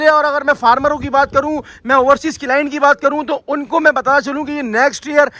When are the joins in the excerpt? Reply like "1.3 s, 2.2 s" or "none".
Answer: none